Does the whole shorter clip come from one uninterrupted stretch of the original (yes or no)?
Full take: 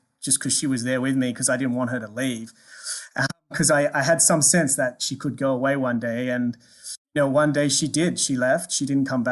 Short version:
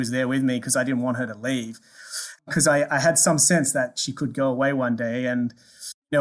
no